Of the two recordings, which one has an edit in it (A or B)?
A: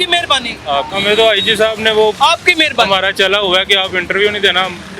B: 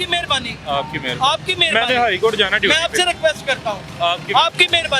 A